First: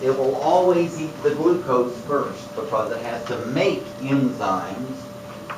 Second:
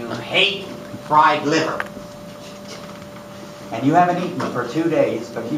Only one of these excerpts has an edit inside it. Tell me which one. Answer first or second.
first